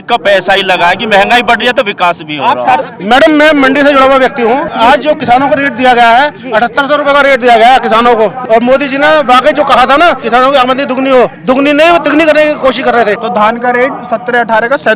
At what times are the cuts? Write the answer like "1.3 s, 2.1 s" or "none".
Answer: 2.9 s, 4.7 s, 8.4 s, 10.2 s, 11.4 s, 13.2 s